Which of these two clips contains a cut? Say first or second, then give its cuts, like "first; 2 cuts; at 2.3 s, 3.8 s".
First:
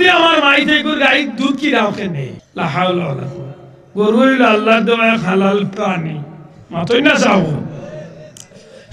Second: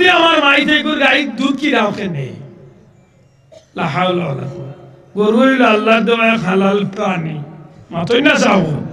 first; 1 cut; at 2.4 s